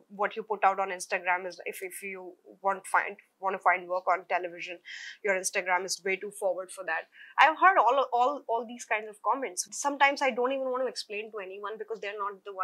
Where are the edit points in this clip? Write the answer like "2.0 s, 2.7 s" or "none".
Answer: 9.6 s

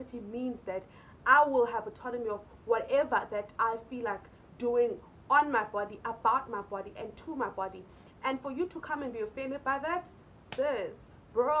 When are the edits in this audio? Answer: none

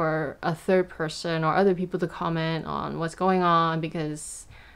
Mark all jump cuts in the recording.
none

